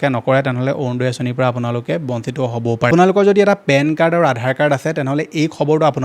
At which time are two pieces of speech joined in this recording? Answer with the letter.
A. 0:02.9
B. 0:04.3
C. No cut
A